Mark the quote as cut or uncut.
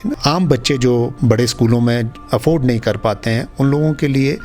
cut